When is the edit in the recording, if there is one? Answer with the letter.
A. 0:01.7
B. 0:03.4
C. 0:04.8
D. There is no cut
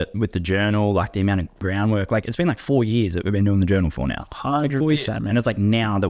A